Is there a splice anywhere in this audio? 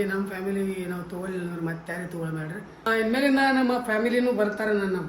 yes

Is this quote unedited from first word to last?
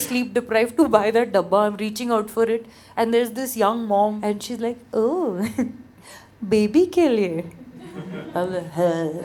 no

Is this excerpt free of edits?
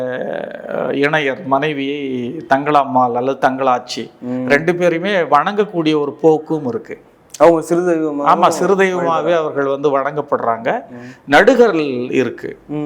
yes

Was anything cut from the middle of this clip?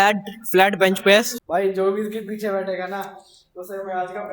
yes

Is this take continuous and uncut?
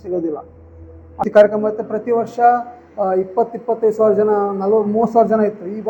no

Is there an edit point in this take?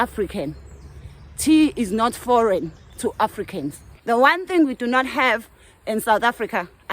yes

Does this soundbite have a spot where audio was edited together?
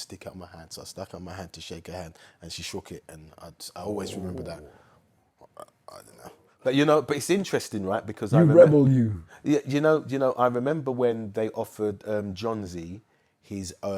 no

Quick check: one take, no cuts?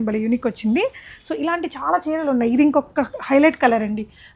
yes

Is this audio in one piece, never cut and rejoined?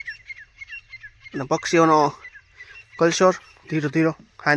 yes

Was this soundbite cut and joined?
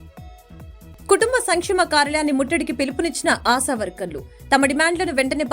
yes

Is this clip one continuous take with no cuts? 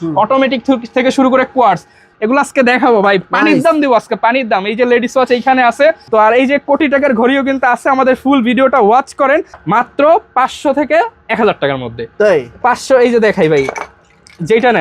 no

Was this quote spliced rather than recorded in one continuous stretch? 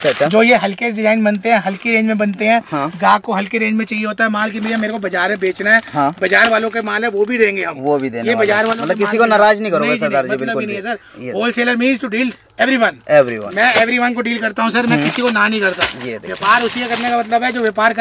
no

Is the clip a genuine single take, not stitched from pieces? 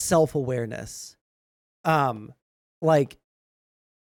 yes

